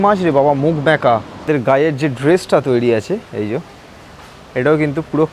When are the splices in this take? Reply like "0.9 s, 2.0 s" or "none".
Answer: 1.5 s